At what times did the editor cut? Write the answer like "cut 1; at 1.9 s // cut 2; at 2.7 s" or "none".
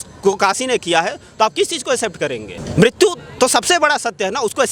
none